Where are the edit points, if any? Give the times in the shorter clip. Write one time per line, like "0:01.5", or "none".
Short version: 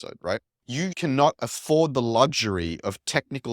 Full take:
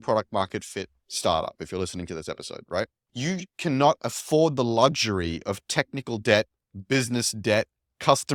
0:01.0